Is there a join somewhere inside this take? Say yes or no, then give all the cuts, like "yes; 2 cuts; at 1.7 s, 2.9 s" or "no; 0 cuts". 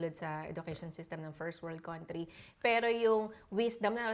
no; 0 cuts